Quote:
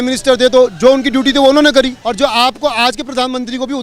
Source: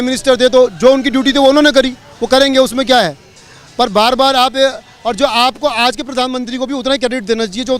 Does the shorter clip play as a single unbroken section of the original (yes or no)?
no